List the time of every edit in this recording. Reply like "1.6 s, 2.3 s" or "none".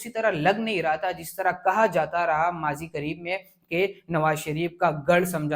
none

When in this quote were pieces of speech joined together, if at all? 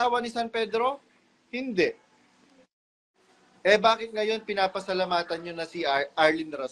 none

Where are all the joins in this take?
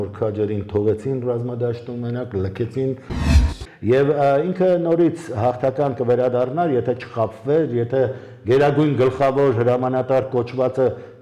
3.4 s

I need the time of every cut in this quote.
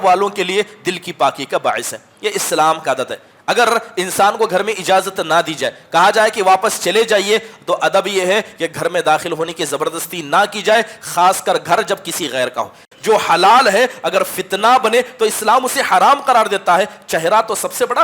12.8 s

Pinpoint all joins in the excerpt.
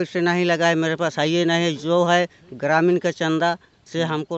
none

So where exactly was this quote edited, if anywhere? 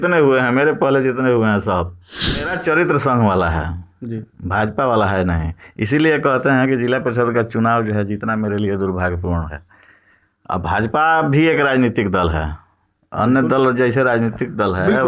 2.5 s

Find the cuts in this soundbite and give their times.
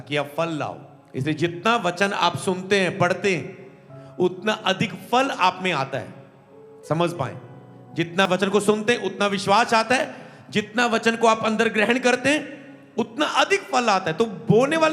8.3 s

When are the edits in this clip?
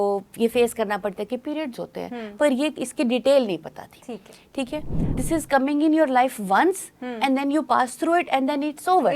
5.1 s

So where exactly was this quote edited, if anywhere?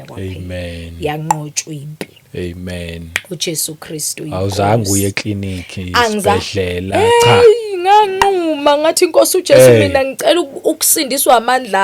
none

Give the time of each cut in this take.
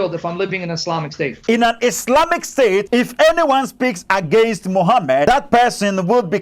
1.4 s, 2.9 s, 5.3 s

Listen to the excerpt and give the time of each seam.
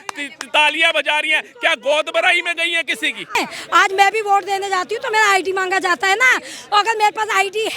3.3 s

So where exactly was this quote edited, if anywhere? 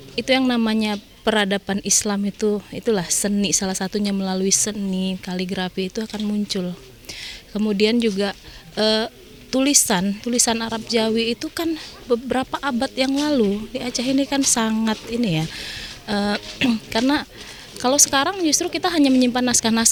none

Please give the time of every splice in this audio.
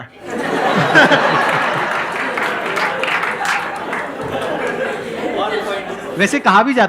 none

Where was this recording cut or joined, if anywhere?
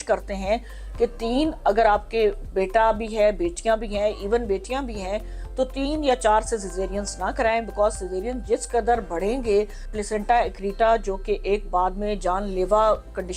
9.9 s

